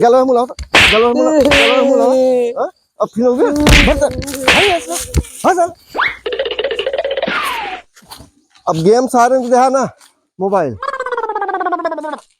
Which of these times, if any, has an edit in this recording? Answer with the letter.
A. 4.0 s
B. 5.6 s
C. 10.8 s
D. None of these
C